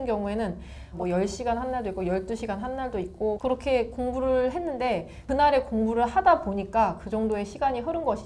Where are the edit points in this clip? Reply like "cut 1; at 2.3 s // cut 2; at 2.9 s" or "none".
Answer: cut 1; at 0.9 s // cut 2; at 3.4 s // cut 3; at 5.2 s